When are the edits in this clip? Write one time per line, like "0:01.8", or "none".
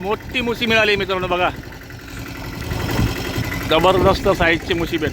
0:03.4